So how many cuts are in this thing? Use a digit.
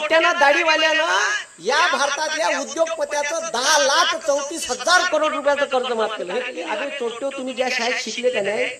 1